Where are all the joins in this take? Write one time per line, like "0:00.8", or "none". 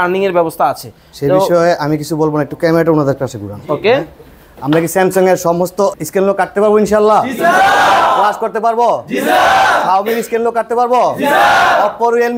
0:05.9